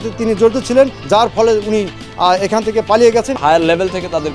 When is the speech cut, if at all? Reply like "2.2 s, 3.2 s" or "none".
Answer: 1.0 s, 3.4 s